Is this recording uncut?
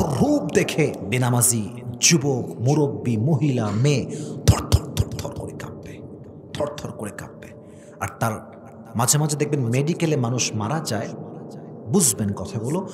no; 1 cut; at 1.0 s

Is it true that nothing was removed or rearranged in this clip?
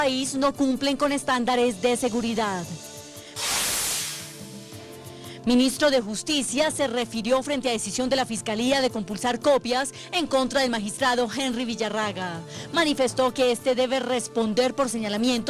yes; 0 cuts

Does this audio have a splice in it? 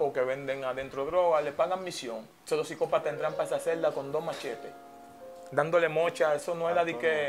yes; 1 cut; at 2.3 s

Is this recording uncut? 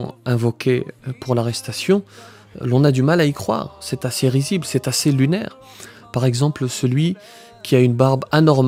yes; 0 cuts

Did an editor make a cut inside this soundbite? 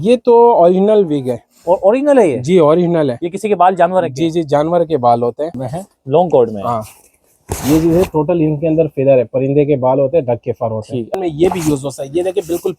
yes; 2 cuts; at 5.7 s, 11.1 s

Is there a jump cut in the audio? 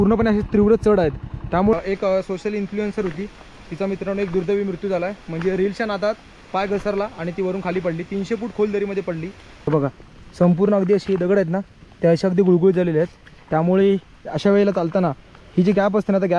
yes; 2 cuts; at 1.7 s, 9.7 s

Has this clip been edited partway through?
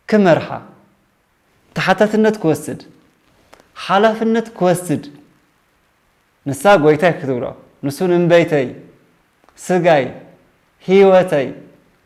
no; 0 cuts

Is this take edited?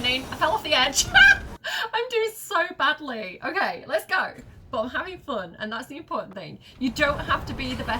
yes; 1 cut; at 1.6 s

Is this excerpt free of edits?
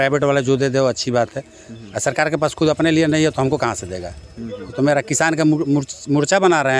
yes; 0 cuts

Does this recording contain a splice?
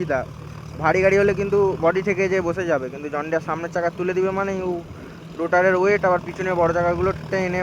no; 0 cuts

